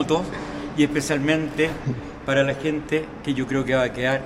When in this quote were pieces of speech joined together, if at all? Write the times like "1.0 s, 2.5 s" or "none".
none